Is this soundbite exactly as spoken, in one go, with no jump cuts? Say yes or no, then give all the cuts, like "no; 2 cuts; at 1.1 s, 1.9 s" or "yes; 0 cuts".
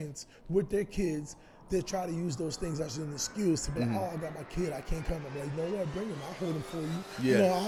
yes; 0 cuts